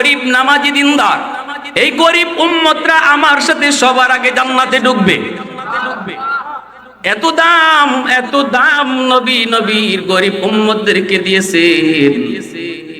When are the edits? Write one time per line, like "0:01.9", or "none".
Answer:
0:06.8